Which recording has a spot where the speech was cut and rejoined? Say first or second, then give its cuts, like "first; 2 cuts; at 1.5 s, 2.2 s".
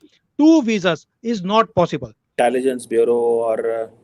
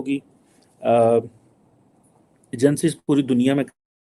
first; 1 cut; at 2.3 s